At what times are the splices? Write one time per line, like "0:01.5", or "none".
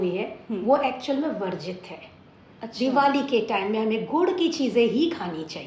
none